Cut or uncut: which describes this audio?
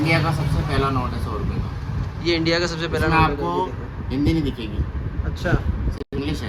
uncut